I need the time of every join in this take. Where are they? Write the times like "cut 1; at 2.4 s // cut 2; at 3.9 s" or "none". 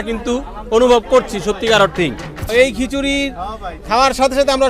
cut 1; at 2.5 s